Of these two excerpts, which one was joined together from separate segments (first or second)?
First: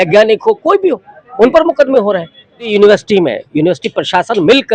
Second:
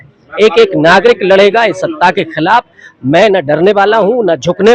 first